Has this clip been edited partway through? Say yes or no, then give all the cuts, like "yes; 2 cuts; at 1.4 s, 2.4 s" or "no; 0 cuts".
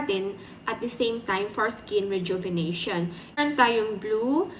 yes; 1 cut; at 3.4 s